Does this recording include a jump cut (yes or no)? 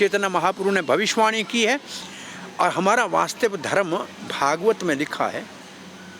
yes